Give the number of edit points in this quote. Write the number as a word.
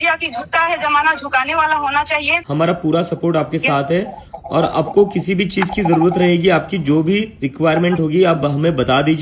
one